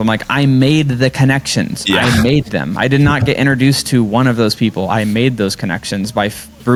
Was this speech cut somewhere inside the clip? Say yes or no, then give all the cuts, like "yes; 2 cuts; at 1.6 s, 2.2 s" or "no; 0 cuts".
no; 0 cuts